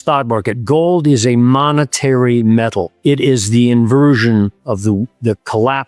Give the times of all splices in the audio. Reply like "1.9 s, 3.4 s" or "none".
2.9 s